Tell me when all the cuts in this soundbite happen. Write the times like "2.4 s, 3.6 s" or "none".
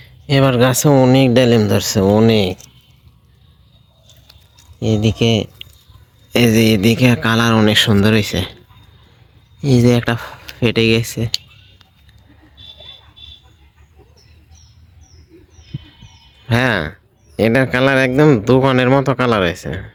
none